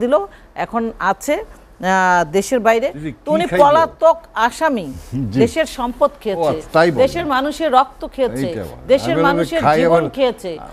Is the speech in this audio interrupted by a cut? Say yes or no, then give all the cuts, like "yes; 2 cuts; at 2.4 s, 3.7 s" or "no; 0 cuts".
no; 0 cuts